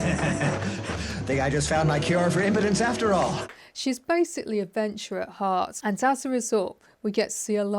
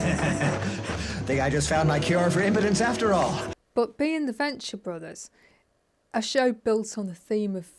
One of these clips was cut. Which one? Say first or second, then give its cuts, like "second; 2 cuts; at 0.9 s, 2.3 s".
first; 2 cuts; at 3.5 s, 5.8 s